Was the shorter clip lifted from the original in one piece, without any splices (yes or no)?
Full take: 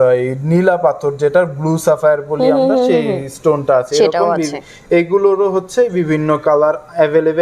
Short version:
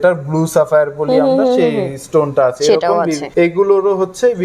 no